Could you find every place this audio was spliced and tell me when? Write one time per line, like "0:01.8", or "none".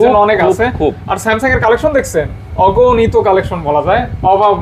none